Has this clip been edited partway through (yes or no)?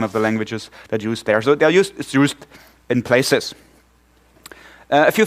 yes